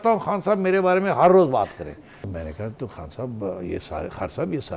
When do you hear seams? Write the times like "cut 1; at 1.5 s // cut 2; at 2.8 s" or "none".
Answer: cut 1; at 2.3 s